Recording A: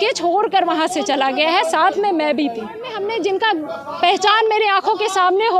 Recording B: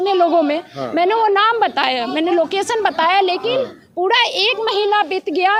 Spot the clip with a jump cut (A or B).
A